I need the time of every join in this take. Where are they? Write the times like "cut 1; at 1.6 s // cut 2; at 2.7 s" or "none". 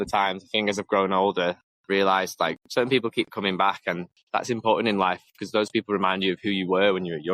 cut 1; at 1.7 s // cut 2; at 2.6 s // cut 3; at 4.1 s